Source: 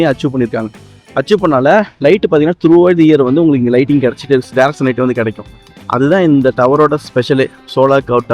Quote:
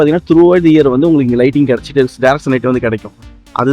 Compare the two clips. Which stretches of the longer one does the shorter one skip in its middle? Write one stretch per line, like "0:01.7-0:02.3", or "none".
none